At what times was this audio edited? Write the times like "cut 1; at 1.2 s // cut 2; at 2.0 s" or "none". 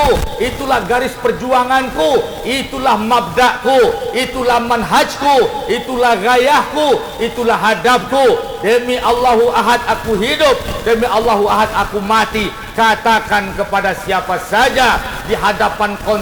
none